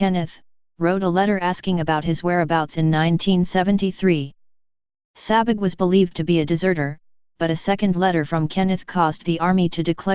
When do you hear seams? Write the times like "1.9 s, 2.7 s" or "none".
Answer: 3.2 s